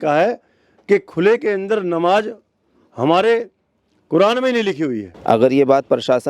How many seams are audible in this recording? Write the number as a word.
one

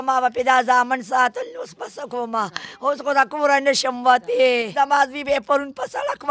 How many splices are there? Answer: one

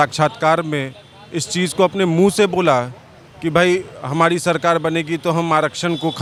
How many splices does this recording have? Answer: zero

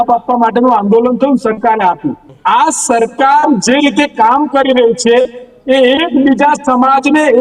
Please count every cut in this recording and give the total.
one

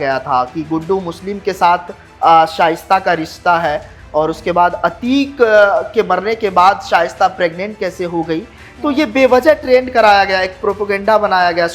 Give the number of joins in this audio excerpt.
zero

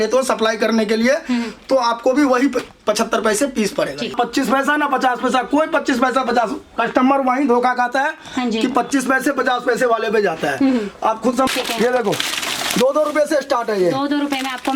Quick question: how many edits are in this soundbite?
two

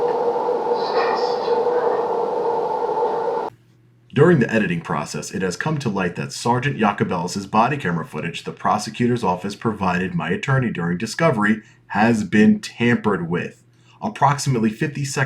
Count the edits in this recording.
two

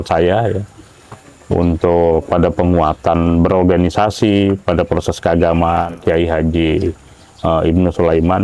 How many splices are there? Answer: one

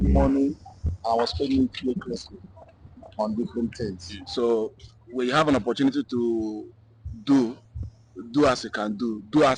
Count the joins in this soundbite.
one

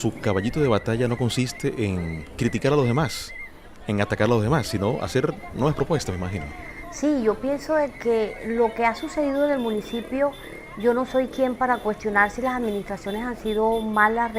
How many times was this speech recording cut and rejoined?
zero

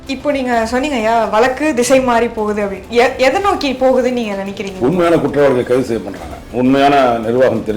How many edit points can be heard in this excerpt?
one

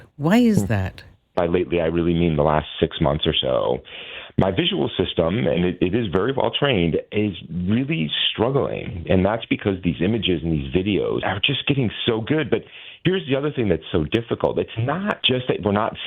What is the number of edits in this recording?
three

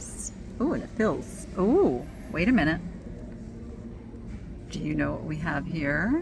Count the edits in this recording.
zero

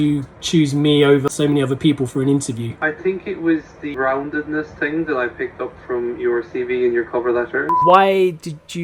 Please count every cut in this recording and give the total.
three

